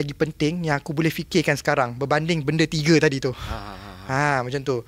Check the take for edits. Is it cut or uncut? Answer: uncut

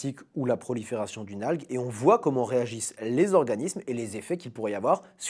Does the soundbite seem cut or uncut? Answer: cut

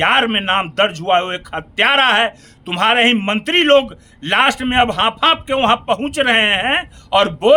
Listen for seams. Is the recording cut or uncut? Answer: uncut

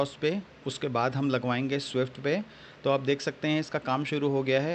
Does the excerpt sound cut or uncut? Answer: uncut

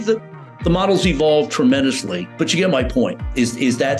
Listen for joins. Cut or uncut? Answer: cut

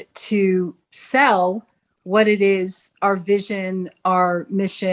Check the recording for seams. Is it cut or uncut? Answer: uncut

